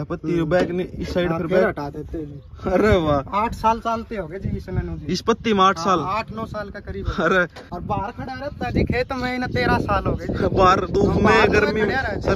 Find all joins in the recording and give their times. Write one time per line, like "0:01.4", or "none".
0:07.7

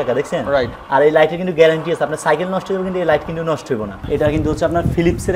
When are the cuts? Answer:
0:04.0

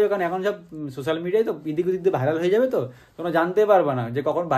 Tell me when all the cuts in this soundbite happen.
none

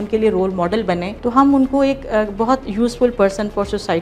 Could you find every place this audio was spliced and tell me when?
0:01.1

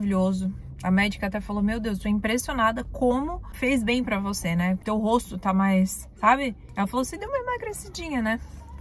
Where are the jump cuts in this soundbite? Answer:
0:03.5
0:04.8
0:06.6

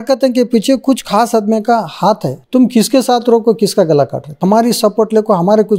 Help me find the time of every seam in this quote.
0:02.3
0:04.4

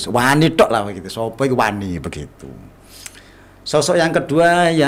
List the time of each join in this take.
none

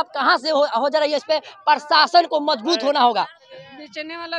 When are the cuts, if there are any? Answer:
0:03.4

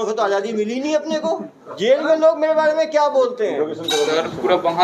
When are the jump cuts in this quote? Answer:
0:01.6

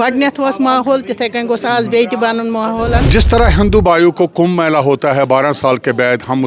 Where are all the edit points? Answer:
0:03.1

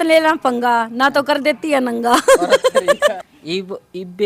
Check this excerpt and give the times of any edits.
0:03.1

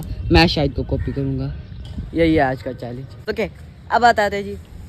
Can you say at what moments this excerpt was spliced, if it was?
0:03.2

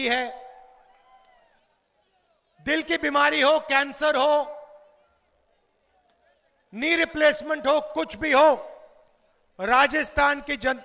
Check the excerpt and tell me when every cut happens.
0:01.6

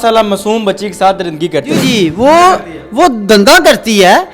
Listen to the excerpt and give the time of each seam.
0:01.8

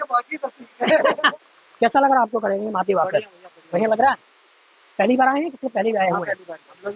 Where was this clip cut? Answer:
0:01.4

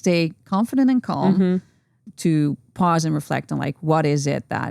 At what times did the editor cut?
0:02.1

